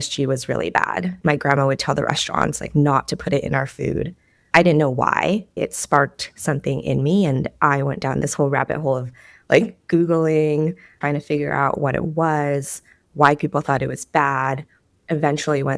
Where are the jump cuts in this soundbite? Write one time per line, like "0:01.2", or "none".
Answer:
0:01.1
0:05.6